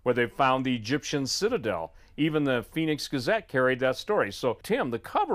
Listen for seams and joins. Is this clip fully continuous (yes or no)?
yes